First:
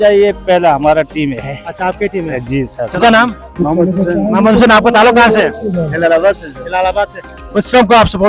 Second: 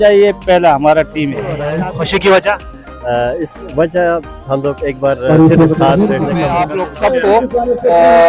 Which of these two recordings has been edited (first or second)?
second